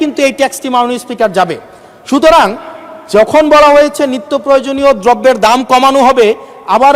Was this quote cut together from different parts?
no; 0 cuts

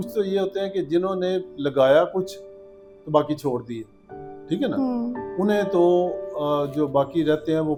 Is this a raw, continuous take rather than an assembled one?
yes; 0 cuts

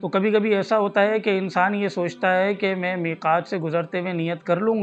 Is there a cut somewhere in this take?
no; 0 cuts

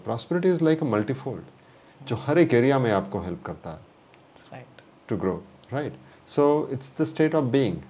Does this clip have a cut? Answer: no; 0 cuts

